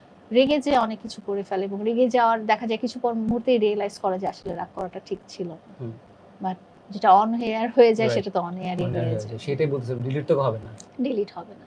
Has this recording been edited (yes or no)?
no